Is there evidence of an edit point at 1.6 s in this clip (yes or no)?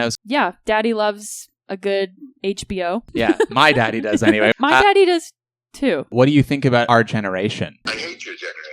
no